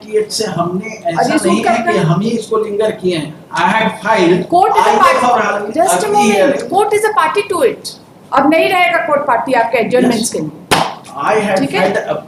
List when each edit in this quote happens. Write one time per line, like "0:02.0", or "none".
none